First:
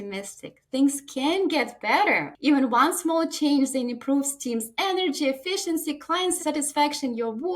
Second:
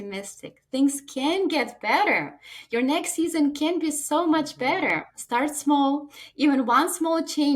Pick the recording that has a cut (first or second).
first